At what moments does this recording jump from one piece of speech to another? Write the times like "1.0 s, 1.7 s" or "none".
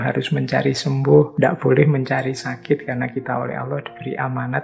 1.3 s